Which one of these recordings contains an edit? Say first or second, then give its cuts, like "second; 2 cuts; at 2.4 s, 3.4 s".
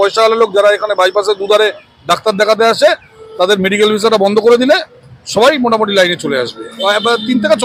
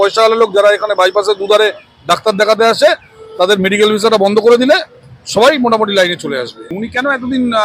second; 1 cut; at 6.7 s